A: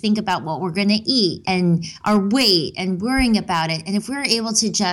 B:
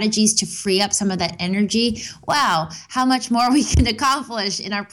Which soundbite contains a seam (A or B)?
A